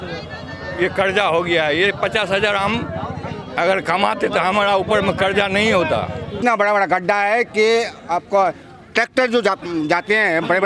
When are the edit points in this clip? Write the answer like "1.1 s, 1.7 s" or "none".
6.3 s